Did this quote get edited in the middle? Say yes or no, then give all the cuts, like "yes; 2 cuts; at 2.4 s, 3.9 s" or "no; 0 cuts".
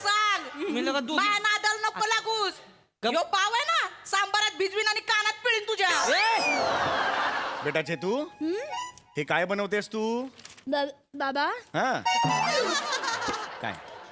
yes; 1 cut; at 7.5 s